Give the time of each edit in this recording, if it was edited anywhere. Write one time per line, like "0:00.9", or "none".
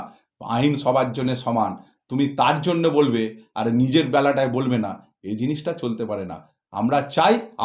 none